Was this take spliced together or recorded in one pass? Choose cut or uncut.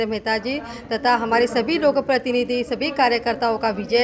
uncut